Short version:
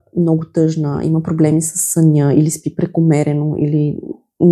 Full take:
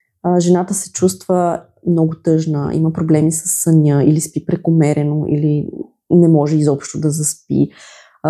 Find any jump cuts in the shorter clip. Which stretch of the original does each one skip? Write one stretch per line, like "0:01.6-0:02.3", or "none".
none